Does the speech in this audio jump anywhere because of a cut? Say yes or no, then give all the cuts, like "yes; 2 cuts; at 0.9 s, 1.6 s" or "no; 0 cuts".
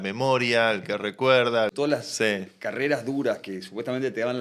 yes; 1 cut; at 1.7 s